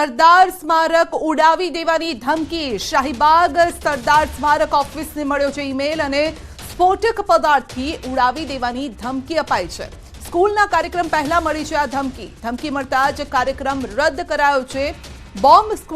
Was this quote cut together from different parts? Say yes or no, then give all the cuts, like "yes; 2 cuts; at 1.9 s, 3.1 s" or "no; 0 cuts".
yes; 1 cut; at 1.1 s